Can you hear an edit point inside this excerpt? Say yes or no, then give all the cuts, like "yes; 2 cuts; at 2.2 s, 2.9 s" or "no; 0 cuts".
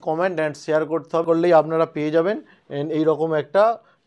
yes; 1 cut; at 1.2 s